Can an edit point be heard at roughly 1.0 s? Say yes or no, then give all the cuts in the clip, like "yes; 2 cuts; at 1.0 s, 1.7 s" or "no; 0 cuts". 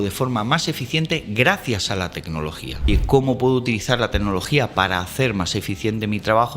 no; 1 cut; at 2.9 s